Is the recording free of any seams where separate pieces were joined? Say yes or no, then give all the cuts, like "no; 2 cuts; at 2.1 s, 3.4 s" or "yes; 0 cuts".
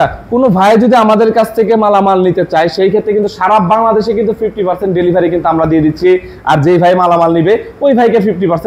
yes; 0 cuts